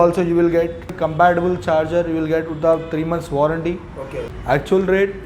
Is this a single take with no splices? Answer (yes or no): no